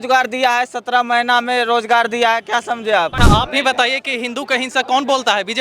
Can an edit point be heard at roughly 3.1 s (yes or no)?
yes